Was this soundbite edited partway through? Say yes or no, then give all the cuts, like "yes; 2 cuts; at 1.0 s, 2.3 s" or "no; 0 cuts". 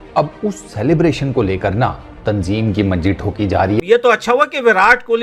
yes; 1 cut; at 3.8 s